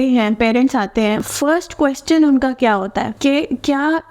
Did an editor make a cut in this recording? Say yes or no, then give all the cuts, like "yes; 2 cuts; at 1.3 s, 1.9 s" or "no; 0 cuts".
yes; 2 cuts; at 1.3 s, 3.1 s